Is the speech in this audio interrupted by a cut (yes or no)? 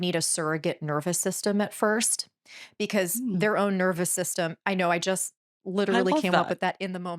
no